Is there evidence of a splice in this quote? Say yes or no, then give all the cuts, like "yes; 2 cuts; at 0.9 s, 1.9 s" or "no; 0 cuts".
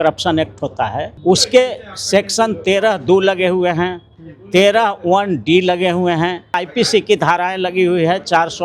yes; 2 cuts; at 1.1 s, 6.6 s